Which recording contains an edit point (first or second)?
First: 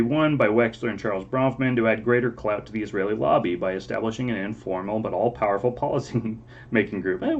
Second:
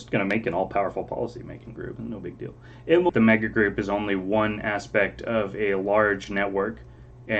second